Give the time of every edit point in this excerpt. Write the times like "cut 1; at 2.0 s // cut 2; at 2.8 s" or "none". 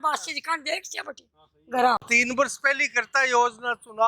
cut 1; at 2.1 s

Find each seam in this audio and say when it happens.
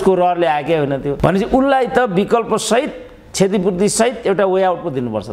cut 1; at 1.1 s

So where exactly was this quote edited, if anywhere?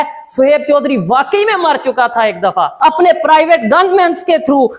cut 1; at 2.7 s

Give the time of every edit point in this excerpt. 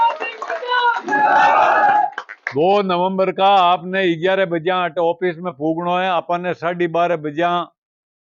none

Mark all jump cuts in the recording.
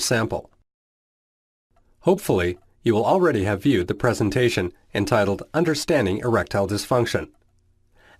cut 1; at 4.5 s

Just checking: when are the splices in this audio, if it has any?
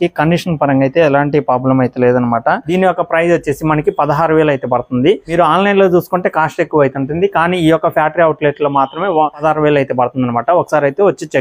cut 1; at 2.6 s // cut 2; at 9.4 s

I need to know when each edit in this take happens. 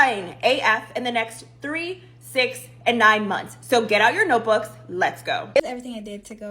cut 1; at 5.6 s

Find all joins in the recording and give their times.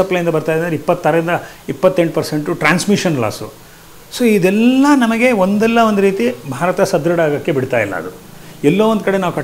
none

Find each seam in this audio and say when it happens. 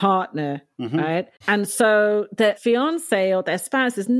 cut 1; at 1.4 s // cut 2; at 2.6 s

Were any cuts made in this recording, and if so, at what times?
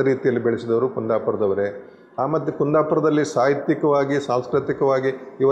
none

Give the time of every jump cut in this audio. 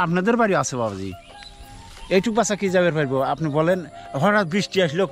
none

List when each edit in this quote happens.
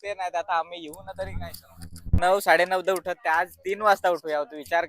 cut 1; at 2.1 s

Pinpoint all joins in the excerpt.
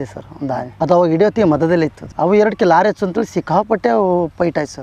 cut 1; at 2.0 s

